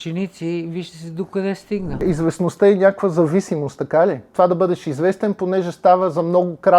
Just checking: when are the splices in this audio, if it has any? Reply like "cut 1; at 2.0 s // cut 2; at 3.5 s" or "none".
cut 1; at 2.0 s // cut 2; at 4.2 s